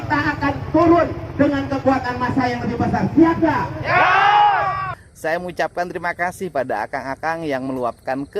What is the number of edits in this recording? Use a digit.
1